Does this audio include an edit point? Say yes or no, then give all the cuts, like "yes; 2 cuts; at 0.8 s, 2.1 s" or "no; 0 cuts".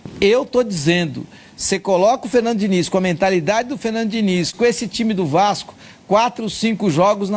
yes; 1 cut; at 4.5 s